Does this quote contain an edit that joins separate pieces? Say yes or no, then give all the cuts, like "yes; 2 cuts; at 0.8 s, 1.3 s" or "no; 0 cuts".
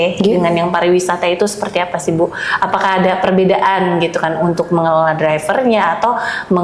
no; 0 cuts